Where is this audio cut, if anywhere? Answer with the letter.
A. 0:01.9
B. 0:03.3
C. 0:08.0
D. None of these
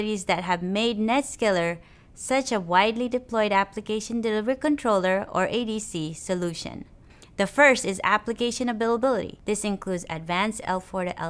C